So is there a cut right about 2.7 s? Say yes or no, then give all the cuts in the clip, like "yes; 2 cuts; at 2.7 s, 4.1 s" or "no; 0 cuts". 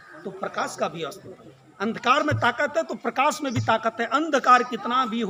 no; 0 cuts